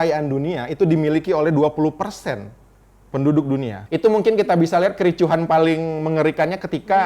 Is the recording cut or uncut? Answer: cut